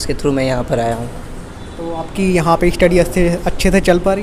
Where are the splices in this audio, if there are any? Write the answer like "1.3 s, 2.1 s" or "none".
none